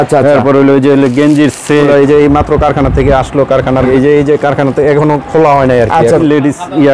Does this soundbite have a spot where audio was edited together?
yes; 3 cuts; at 1.9 s, 3.9 s, 6.2 s

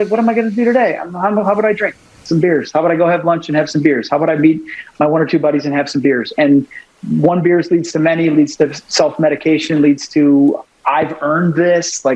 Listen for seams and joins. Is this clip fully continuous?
yes; 0 cuts

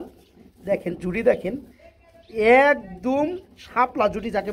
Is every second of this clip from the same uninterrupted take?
yes; 0 cuts

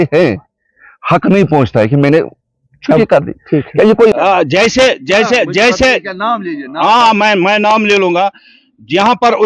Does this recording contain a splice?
yes; 1 cut; at 4.1 s

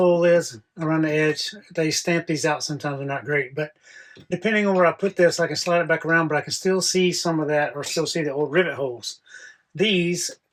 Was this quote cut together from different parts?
no; 0 cuts

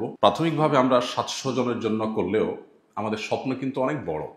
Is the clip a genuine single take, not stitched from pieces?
yes; 0 cuts

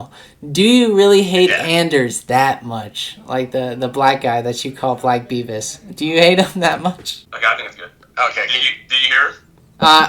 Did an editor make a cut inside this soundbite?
yes; 1 cut; at 7.3 s

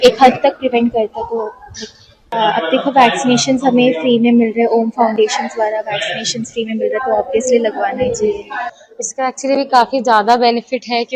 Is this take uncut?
no; 1 cut; at 8.7 s

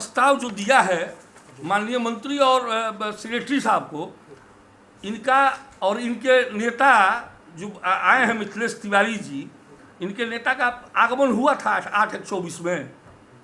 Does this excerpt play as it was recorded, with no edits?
yes; 0 cuts

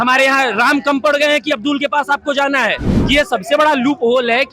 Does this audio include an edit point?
yes; 1 cut; at 2.9 s

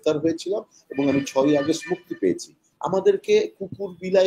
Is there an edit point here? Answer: no; 0 cuts

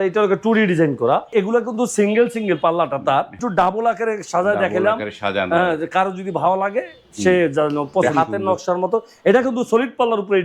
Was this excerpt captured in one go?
no; 3 cuts; at 1.3 s, 3.4 s, 8.0 s

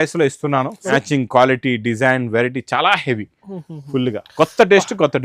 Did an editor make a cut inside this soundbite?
yes; 1 cut; at 0.9 s

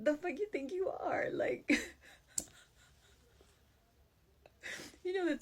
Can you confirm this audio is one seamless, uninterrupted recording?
no; 1 cut; at 2.4 s

